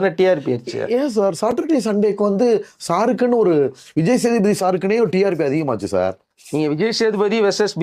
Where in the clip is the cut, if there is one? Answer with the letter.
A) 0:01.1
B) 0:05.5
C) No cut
C